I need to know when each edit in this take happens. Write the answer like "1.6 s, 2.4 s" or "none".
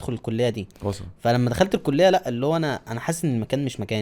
none